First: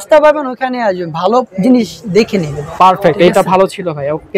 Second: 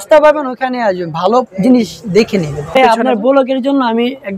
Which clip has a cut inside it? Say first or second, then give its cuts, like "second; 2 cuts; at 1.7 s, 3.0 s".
second; 1 cut; at 2.8 s